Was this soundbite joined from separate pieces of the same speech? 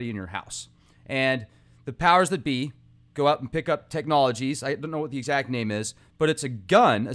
yes; 1 cut; at 3.6 s

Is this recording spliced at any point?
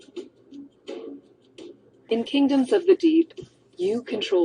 no; 0 cuts

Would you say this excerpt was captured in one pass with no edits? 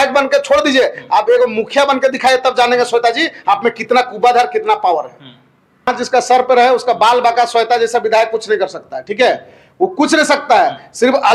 no; 1 cut; at 5.9 s

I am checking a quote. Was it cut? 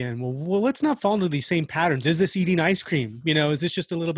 no; 0 cuts

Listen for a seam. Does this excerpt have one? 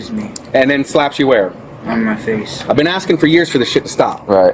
no; 0 cuts

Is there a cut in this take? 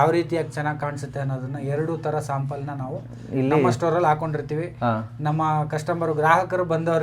no; 0 cuts

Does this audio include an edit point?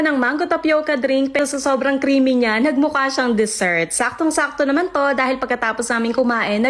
yes; 1 cut; at 1.4 s

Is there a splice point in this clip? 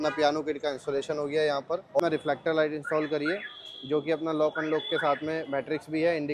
yes; 1 cut; at 2.0 s

